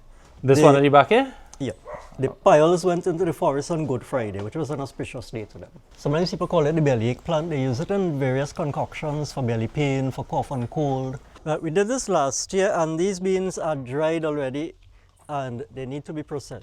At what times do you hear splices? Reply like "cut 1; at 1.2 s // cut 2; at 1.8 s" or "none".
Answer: cut 1; at 5.8 s // cut 2; at 11.3 s